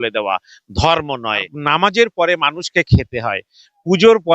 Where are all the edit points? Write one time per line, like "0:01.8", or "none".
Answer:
0:01.5